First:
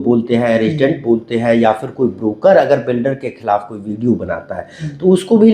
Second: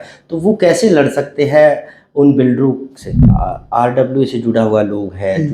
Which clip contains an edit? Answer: second; 1 cut; at 3.3 s

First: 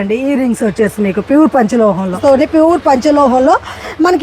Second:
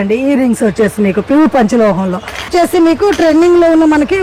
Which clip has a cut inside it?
first; 1 cut; at 2.2 s

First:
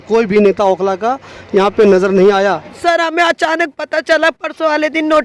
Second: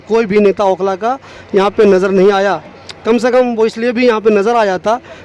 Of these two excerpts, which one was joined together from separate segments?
first; 1 cut; at 2.8 s

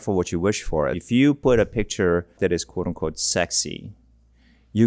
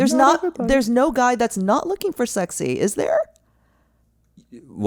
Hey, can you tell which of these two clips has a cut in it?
first; 2 cuts; at 1.0 s, 2.4 s

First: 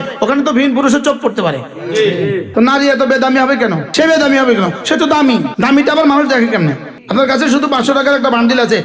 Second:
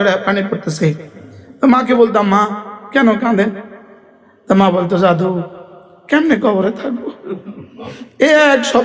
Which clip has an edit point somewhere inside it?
first; 4 cuts; at 2.5 s, 3.8 s, 5.5 s, 6.9 s

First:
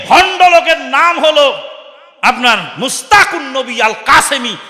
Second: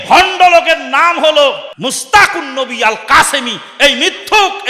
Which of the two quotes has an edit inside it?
second; 1 cut; at 1.7 s

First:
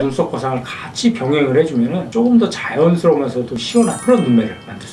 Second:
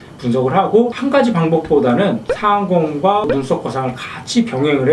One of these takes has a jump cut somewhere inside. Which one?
second; 2 cuts; at 1.0 s, 2.3 s

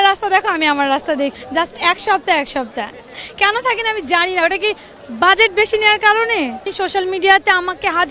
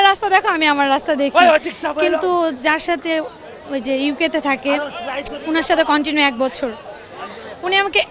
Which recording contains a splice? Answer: first; 3 cuts; at 1.3 s, 3.1 s, 6.7 s

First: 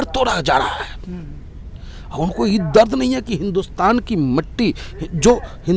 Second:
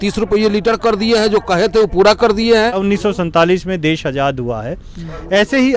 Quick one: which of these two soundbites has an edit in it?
second; 1 cut; at 2.8 s

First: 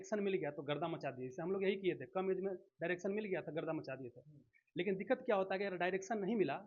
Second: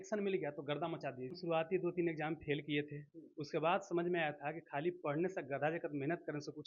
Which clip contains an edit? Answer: second; 1 cut; at 1.4 s

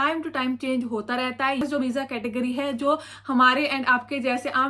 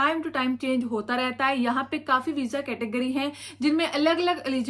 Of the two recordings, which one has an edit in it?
first; 1 cut; at 1.6 s

